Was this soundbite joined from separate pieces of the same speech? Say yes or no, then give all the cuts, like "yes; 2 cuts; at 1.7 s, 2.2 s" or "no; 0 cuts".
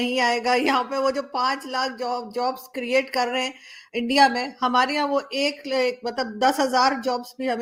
no; 0 cuts